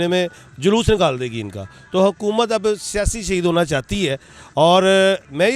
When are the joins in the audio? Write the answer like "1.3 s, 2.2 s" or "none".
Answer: none